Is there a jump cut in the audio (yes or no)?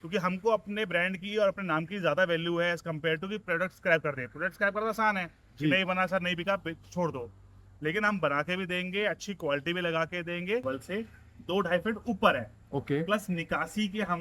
yes